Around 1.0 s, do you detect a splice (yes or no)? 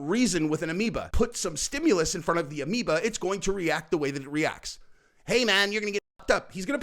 yes